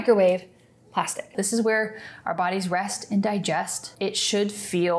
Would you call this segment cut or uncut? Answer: cut